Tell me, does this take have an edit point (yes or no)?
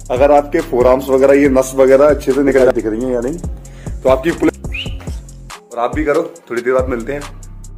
yes